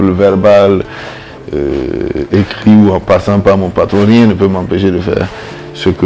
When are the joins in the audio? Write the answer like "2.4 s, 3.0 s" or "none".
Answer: none